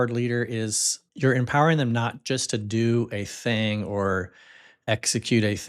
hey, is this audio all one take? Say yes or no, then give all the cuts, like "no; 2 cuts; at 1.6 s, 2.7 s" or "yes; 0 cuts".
no; 1 cut; at 1.0 s